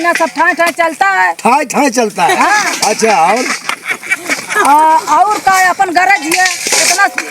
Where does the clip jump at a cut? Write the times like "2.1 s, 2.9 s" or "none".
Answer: none